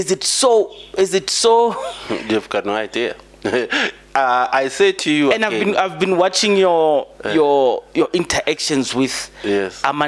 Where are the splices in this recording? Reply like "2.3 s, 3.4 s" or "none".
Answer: none